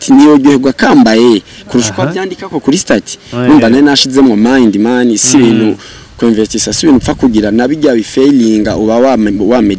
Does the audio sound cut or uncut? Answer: uncut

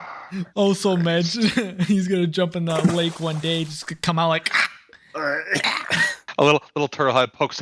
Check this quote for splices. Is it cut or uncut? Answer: cut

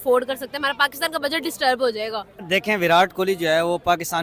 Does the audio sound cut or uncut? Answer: cut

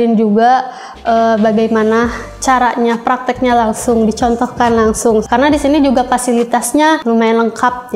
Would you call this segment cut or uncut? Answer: cut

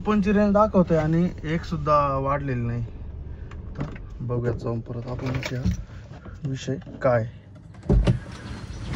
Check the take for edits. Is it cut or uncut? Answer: uncut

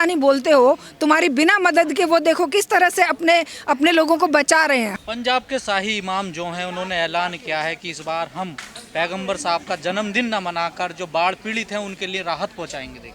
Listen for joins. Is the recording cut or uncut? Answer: cut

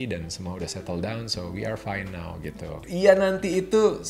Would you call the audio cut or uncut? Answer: cut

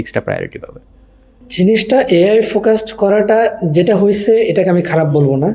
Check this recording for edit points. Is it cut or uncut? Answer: uncut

